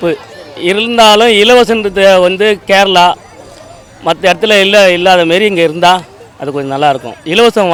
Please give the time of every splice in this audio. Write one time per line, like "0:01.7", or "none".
none